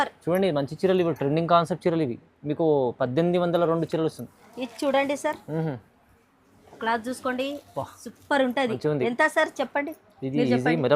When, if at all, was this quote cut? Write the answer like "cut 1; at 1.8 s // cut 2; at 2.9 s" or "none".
cut 1; at 4.4 s